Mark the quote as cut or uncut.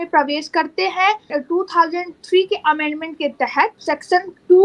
cut